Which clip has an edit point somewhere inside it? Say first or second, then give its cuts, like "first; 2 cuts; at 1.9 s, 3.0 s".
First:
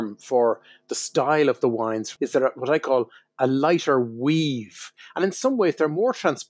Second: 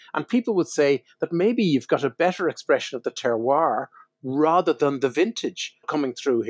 first; 2 cuts; at 2.1 s, 5.0 s